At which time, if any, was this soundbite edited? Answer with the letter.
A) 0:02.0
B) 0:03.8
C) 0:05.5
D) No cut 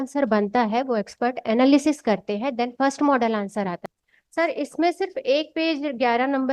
B